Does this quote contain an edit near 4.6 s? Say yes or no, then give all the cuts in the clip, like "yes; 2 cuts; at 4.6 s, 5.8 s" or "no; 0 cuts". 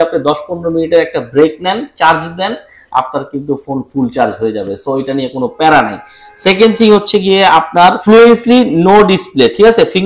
no; 0 cuts